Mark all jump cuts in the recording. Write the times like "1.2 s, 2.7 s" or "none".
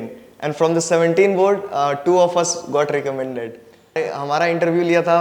4.0 s